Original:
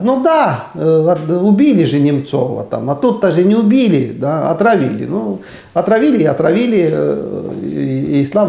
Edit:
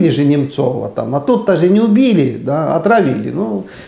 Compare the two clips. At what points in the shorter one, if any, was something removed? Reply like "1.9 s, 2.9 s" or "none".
none